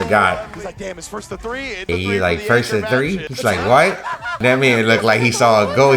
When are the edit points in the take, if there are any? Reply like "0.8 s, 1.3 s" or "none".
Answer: 1.9 s